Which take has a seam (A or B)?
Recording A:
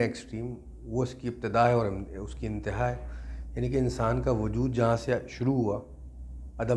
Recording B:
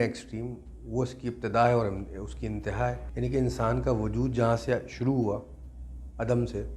B